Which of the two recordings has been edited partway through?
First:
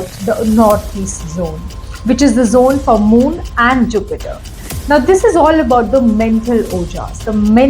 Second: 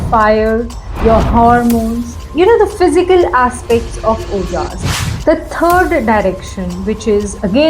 second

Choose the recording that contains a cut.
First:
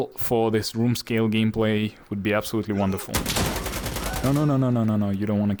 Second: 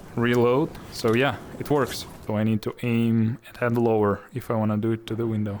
second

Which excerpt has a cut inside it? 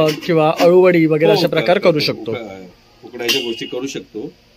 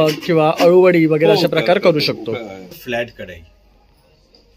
second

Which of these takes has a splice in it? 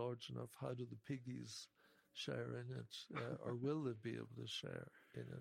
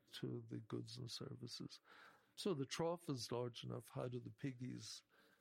second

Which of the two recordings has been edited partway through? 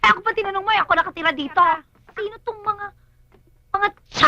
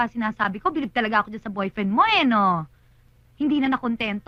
first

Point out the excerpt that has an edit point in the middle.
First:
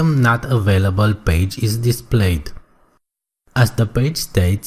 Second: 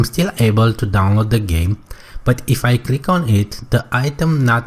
first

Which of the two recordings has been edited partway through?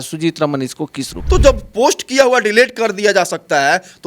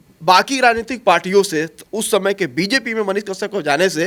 first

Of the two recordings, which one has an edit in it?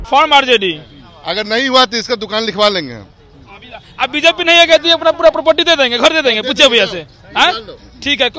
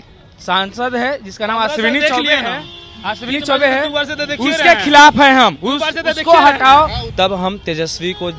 second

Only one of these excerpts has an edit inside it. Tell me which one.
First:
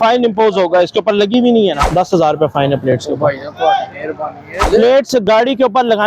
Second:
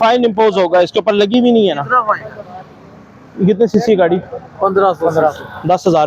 first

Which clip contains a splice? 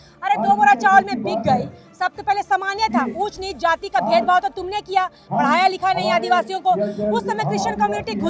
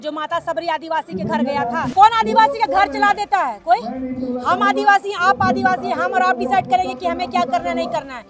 second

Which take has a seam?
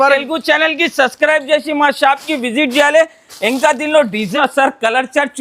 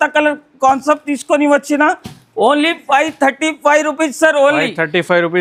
first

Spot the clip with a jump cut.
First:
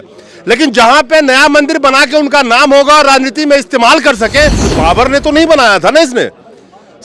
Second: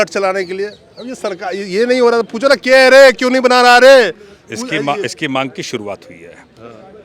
first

